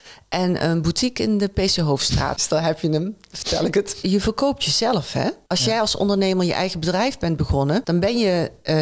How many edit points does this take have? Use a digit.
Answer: 4